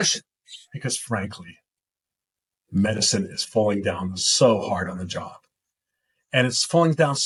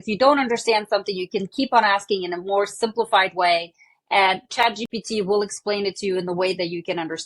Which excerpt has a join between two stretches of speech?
second; 1 cut; at 4.5 s

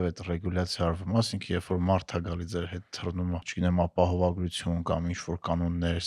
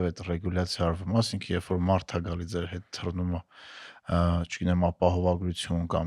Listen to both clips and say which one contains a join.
first; 1 cut; at 3.5 s

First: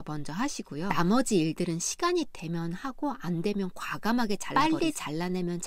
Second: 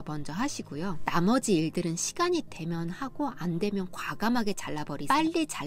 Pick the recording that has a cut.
first; 2 cuts; at 0.9 s, 4.5 s

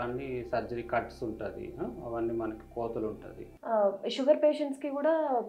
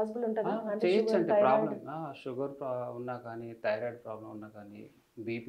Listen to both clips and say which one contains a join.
first; 1 cut; at 3.6 s

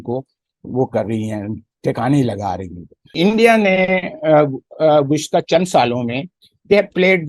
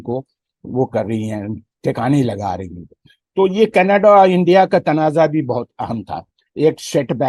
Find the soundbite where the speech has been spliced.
first; 1 cut; at 3.1 s

